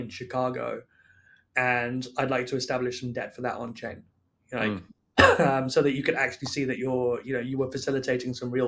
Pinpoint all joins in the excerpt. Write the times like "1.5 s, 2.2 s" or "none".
none